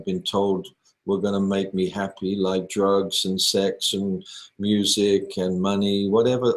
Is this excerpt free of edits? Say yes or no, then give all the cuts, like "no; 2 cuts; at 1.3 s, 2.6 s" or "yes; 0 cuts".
yes; 0 cuts